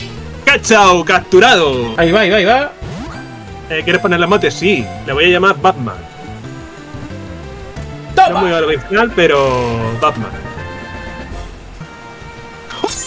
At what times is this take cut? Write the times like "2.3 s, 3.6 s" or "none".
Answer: 1.9 s, 11.9 s